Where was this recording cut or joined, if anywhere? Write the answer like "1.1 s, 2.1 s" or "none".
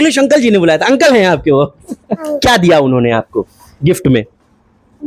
2.3 s